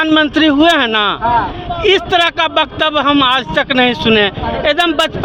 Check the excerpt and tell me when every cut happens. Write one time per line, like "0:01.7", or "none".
none

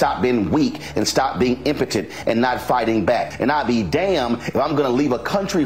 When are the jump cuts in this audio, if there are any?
0:03.3

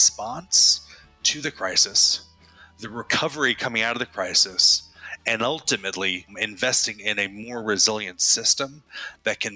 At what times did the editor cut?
0:06.3

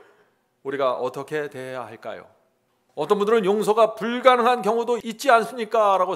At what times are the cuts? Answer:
0:05.1

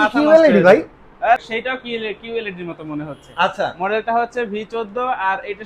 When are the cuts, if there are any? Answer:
0:01.4

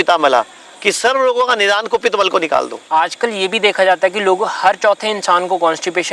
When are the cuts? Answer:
none

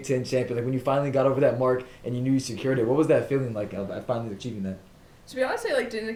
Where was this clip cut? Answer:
none

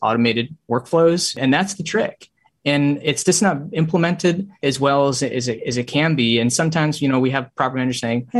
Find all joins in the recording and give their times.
0:01.4
0:04.6

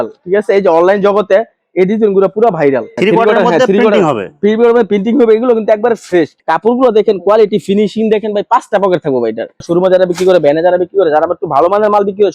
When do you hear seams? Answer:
0:02.9
0:06.4
0:09.6

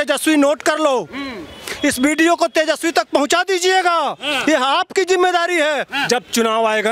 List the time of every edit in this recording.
0:06.0

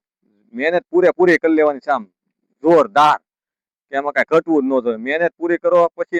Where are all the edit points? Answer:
none

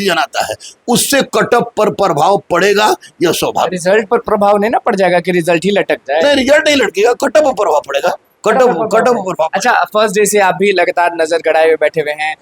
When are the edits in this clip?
none

